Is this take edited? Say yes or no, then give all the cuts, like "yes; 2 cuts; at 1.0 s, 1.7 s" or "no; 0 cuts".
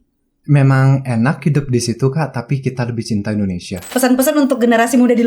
yes; 1 cut; at 3.7 s